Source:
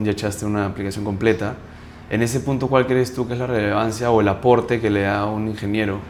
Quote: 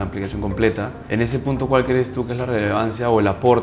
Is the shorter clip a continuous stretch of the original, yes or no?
no